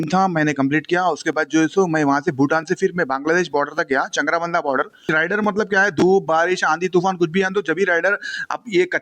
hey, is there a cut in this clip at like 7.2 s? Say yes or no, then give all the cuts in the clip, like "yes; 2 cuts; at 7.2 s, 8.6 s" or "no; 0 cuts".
no; 1 cut; at 5.0 s